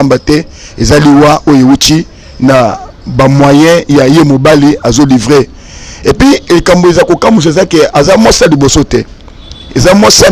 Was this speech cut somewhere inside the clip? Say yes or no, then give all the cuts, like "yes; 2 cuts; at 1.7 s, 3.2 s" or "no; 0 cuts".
no; 0 cuts